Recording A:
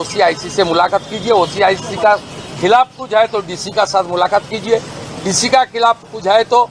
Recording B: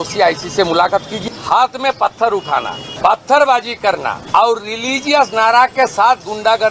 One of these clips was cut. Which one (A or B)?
B